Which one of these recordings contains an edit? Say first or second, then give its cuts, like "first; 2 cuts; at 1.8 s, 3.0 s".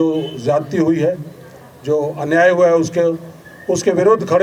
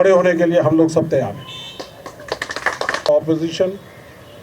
second; 1 cut; at 3.1 s